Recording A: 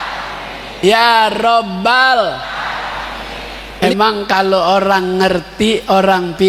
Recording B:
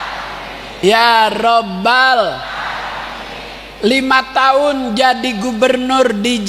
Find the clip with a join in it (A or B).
A